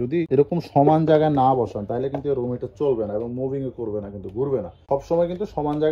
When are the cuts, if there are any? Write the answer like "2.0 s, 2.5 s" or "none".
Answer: 4.7 s